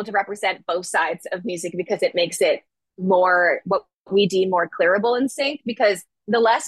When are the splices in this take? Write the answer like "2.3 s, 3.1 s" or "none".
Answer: none